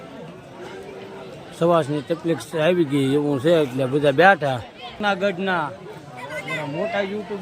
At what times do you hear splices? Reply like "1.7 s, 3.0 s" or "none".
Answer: 5.0 s